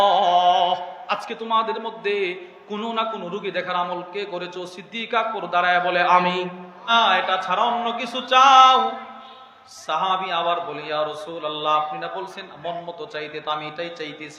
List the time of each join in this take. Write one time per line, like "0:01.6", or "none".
0:06.9